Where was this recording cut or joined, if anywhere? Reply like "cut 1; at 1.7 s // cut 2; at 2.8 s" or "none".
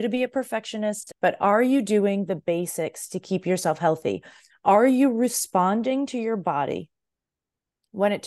cut 1; at 1.1 s